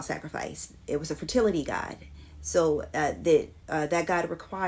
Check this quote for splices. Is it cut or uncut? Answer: uncut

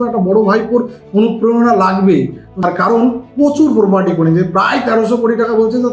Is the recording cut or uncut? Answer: cut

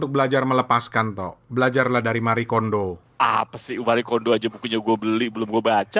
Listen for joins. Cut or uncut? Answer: uncut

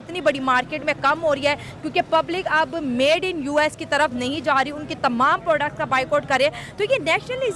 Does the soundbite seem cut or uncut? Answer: uncut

